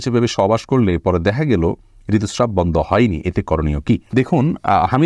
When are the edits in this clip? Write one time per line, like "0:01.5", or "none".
none